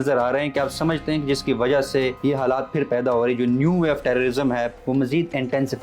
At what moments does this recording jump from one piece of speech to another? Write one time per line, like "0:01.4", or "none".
0:02.2
0:04.8